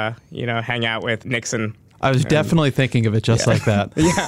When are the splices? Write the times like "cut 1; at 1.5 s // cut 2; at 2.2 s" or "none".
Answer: cut 1; at 1.2 s

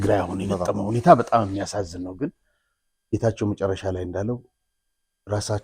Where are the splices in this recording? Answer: none

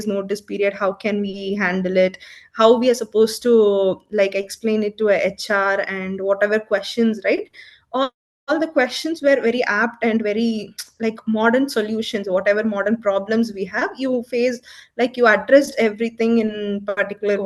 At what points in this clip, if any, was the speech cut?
none

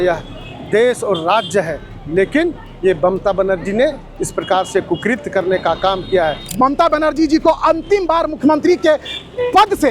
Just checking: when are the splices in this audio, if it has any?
cut 1; at 6.4 s

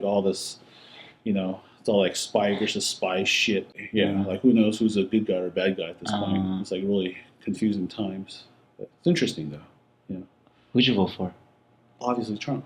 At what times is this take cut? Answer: cut 1; at 3.8 s

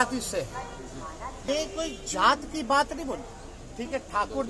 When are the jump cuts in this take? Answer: cut 1; at 1.4 s

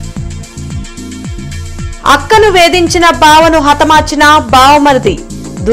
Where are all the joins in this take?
none

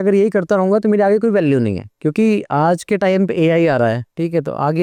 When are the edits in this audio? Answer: none

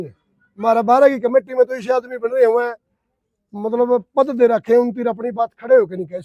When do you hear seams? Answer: none

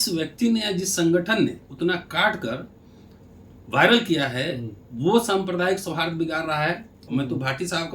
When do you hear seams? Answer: cut 1; at 7.0 s

